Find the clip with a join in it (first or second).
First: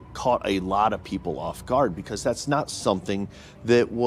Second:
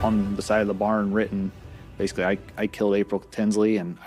first